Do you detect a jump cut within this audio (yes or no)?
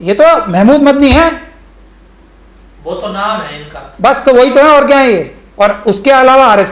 no